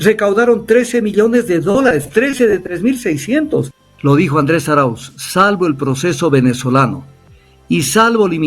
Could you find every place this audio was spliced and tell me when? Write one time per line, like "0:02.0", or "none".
0:03.8